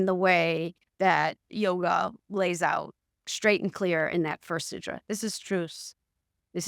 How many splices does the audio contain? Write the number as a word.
one